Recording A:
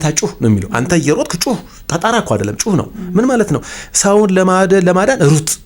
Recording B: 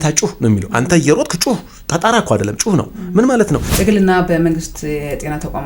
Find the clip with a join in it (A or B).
B